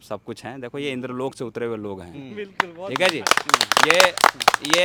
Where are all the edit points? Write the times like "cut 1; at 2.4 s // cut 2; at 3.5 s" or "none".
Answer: none

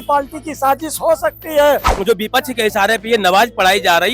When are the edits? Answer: cut 1; at 1.9 s

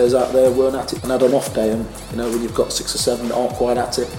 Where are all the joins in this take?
cut 1; at 0.9 s

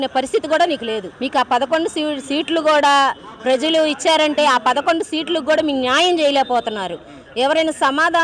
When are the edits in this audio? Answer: cut 1; at 1.1 s

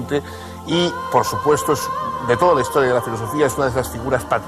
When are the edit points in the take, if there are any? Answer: cut 1; at 1.9 s

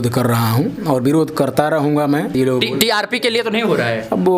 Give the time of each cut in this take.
cut 1; at 2.4 s

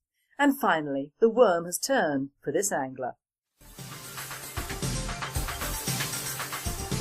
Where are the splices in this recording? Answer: cut 1; at 1.3 s

